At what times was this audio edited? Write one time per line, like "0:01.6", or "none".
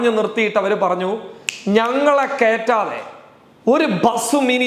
none